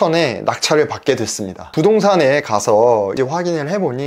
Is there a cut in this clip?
yes; 2 cuts; at 1.6 s, 3.1 s

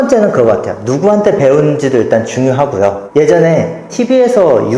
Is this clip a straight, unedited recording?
yes; 0 cuts

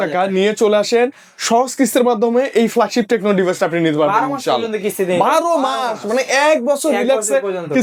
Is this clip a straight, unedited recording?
yes; 0 cuts

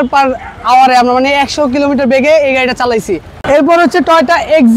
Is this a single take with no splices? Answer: no; 1 cut; at 3.3 s

